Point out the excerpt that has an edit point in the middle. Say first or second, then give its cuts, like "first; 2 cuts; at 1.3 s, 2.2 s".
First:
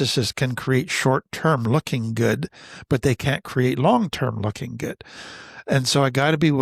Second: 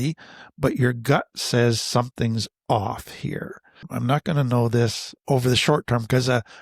second; 2 cuts; at 3.9 s, 5.1 s